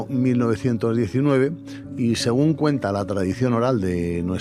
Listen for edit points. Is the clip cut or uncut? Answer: uncut